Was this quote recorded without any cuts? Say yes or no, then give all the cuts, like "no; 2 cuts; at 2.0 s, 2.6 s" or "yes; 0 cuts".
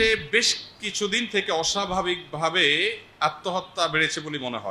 yes; 0 cuts